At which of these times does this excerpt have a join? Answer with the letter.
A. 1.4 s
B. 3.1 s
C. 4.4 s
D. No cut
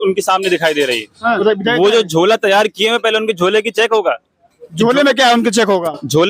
A